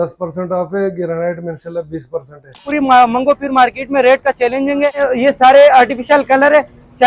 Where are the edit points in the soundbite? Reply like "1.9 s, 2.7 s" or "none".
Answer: 2.6 s, 4.9 s